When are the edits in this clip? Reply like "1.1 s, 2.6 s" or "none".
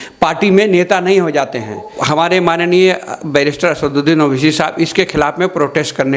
1.9 s